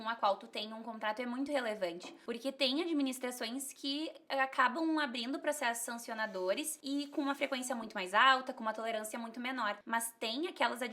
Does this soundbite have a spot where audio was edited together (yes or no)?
yes